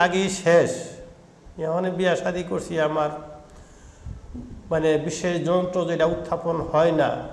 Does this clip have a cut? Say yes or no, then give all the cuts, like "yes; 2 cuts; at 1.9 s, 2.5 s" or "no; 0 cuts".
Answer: no; 0 cuts